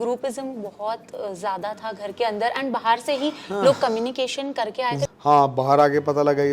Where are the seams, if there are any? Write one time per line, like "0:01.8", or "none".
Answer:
0:05.0